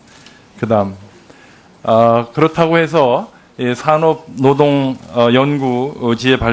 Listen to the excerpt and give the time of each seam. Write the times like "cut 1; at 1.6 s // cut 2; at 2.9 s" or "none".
none

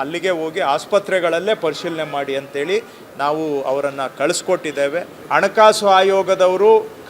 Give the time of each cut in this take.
cut 1; at 5.2 s

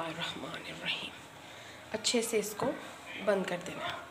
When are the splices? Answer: none

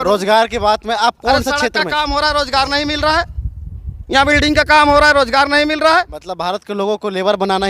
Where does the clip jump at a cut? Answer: none

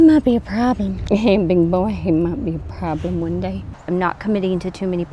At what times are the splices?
cut 1; at 1.0 s // cut 2; at 3.8 s

